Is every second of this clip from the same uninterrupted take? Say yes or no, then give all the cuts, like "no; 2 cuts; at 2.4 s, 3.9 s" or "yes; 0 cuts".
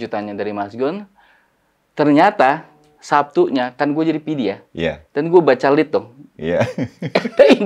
yes; 0 cuts